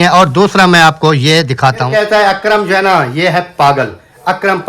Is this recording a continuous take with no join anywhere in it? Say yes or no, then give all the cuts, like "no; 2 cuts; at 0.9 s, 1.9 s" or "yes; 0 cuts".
no; 1 cut; at 1.9 s